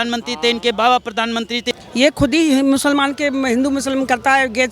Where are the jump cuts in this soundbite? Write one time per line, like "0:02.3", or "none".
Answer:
0:01.7